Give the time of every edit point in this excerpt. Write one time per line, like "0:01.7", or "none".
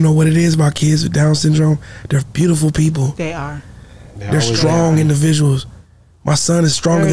none